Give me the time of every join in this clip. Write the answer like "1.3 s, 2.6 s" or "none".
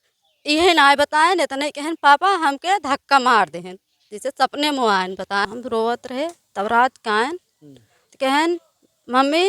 5.4 s